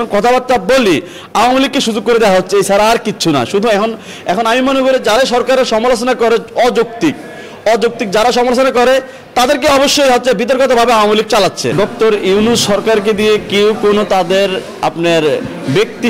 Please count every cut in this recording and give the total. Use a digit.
1